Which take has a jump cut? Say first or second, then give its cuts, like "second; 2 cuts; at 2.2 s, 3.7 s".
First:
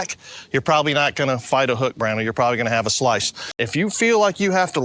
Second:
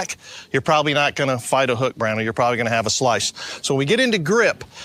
first; 1 cut; at 3.6 s